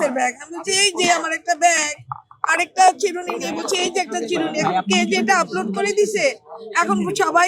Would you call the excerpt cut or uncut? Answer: uncut